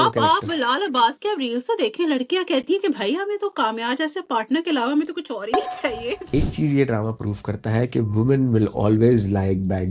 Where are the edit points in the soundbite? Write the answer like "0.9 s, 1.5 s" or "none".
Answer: 6.3 s